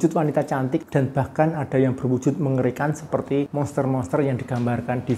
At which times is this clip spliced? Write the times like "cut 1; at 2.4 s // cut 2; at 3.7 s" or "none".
cut 1; at 0.9 s // cut 2; at 3.5 s

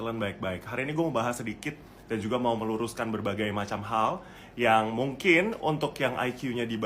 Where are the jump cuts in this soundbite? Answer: none

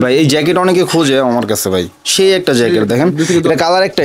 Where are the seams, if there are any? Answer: none

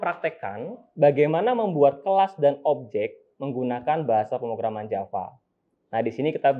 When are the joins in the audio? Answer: none

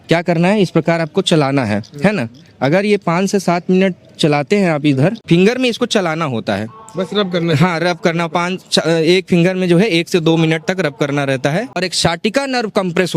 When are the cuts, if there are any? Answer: cut 1; at 5.2 s // cut 2; at 11.8 s

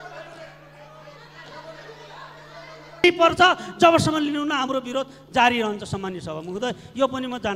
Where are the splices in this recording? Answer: cut 1; at 3.0 s

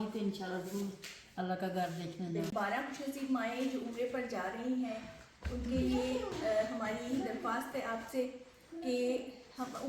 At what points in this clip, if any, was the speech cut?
cut 1; at 2.5 s

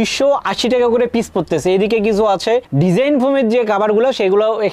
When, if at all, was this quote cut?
none

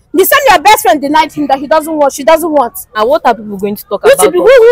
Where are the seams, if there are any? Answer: cut 1; at 2.9 s

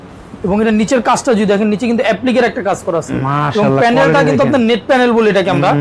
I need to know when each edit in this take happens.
none

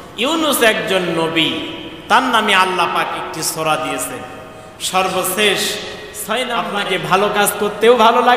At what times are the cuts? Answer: cut 1; at 6.7 s

